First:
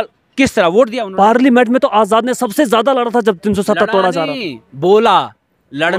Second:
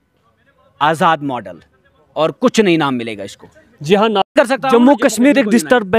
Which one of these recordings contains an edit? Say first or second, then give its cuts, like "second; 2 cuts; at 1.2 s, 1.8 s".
second; 1 cut; at 4.2 s